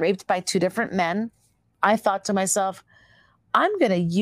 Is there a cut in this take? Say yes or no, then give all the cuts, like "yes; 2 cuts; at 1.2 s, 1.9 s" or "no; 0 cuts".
yes; 1 cut; at 1.7 s